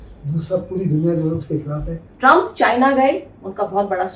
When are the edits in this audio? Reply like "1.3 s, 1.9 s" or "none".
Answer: 2.0 s